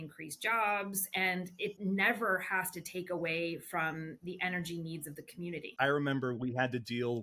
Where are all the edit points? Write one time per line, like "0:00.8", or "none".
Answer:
0:01.8
0:05.7